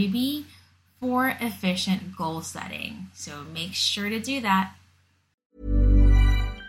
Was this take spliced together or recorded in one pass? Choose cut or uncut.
cut